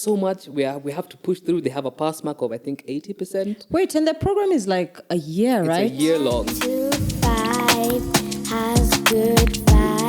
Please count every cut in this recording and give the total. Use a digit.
1